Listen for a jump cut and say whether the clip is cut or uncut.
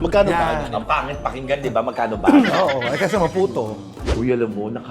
cut